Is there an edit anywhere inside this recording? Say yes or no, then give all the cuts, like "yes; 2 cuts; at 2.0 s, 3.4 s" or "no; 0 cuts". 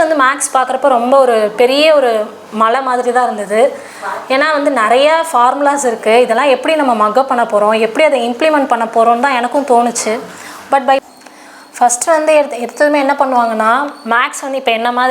yes; 1 cut; at 11.0 s